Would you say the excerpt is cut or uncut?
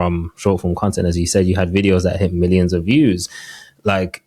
uncut